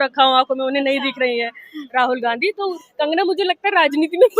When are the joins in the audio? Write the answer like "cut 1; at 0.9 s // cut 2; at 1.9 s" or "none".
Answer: cut 1; at 2.8 s